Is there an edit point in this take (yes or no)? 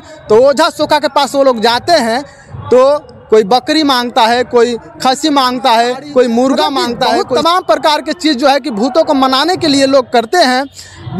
yes